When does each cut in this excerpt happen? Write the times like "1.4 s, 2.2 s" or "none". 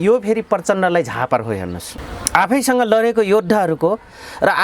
none